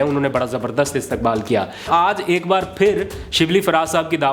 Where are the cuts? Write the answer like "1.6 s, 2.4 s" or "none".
1.9 s